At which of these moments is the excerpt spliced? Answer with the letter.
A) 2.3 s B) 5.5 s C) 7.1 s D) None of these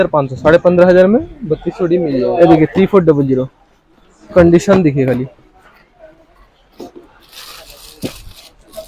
A